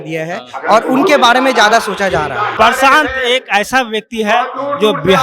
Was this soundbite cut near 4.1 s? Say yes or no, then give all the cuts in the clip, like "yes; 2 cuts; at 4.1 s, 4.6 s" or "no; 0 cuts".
no; 1 cut; at 2.5 s